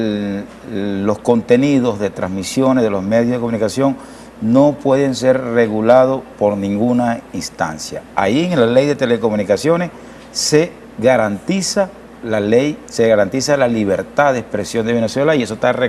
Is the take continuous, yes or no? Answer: yes